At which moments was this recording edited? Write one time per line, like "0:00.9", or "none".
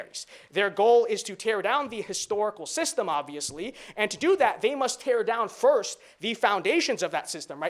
none